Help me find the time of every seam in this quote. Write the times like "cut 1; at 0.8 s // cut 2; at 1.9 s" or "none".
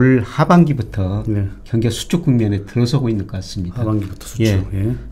none